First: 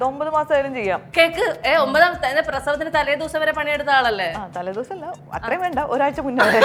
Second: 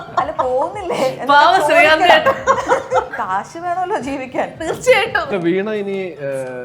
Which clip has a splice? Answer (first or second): second